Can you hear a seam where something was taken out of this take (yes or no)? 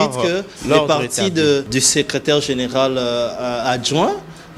yes